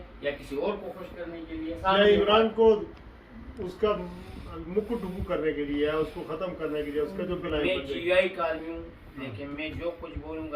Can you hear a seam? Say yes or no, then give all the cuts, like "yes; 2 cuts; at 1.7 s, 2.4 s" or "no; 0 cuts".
yes; 2 cuts; at 1.8 s, 7.4 s